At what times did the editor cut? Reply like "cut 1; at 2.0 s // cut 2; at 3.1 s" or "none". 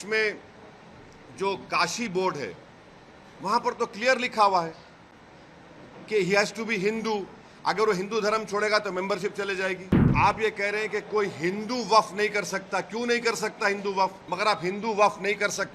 cut 1; at 10.1 s // cut 2; at 14.2 s